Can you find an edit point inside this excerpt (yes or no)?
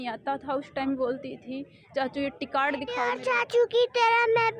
yes